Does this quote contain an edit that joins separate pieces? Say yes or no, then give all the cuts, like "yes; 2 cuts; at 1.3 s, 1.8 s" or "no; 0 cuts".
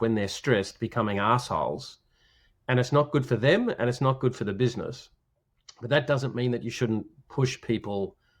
no; 0 cuts